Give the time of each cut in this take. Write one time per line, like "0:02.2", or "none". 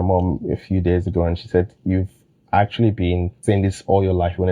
0:03.3